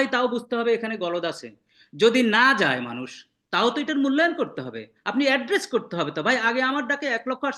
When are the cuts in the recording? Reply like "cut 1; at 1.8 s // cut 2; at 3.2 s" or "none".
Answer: none